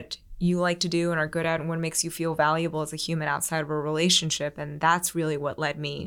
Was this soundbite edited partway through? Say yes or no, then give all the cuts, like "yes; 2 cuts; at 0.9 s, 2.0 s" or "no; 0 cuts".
no; 0 cuts